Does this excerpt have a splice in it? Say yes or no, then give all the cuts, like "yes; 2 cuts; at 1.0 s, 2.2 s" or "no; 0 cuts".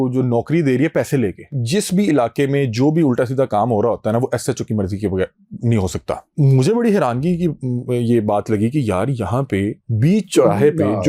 yes; 2 cuts; at 1.6 s, 6.3 s